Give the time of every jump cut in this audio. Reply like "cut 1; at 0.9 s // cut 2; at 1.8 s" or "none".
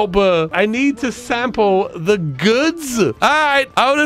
cut 1; at 3.1 s